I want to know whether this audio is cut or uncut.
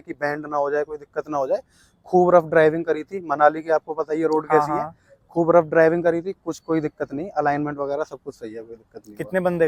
uncut